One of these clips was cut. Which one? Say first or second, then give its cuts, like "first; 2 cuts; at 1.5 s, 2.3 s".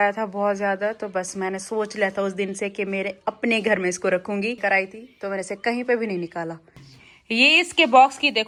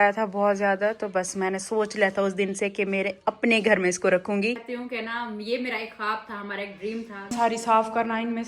second; 2 cuts; at 4.6 s, 7.3 s